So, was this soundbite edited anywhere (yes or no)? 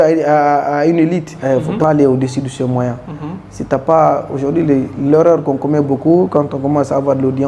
yes